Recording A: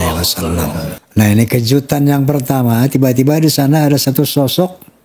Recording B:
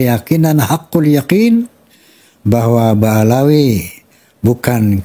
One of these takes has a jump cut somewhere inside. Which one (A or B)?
A